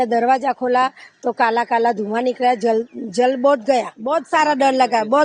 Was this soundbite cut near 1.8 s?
no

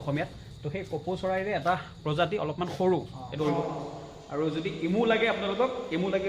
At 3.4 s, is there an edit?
yes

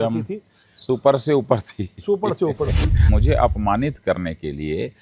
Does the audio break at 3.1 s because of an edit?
yes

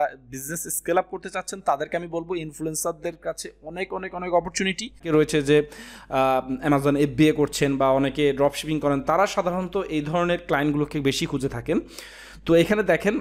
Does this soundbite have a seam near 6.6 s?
no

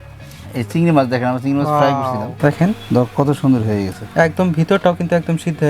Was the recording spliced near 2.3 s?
yes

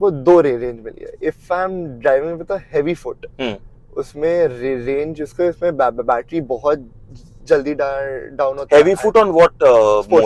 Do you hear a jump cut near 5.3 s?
no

